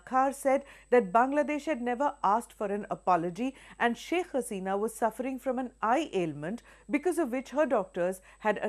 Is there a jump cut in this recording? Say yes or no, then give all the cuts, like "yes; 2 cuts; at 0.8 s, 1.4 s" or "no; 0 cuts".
yes; 1 cut; at 2.2 s